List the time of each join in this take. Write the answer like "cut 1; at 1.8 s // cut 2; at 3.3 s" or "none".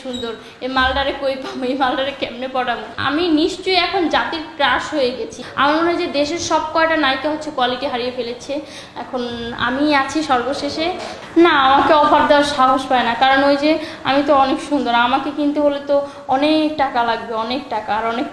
cut 1; at 2.9 s // cut 2; at 5.4 s // cut 3; at 11.1 s